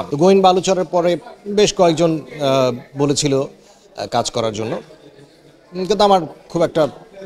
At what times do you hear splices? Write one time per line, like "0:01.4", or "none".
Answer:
none